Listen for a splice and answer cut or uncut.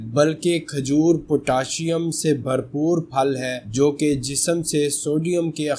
uncut